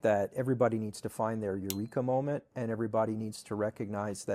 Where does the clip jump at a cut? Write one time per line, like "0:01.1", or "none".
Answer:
none